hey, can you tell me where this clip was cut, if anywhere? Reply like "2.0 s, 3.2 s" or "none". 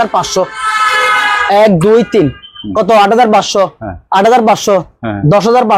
none